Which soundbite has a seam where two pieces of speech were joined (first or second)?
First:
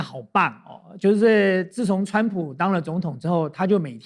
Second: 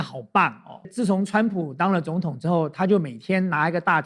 second